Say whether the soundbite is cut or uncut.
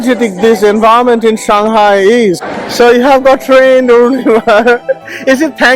cut